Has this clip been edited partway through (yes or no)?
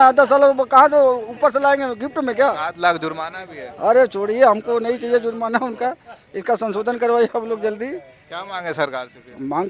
no